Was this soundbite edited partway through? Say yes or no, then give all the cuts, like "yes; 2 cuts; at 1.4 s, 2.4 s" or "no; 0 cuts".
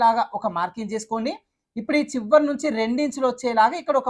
no; 0 cuts